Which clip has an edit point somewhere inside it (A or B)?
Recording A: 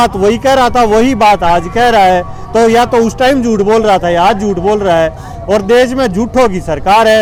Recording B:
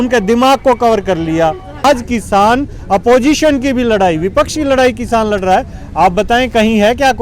B